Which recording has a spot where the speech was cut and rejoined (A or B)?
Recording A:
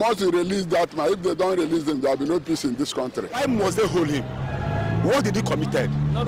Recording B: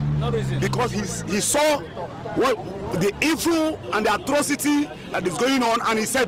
A